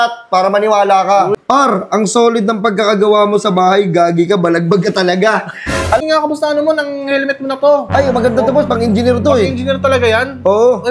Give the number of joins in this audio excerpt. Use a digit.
2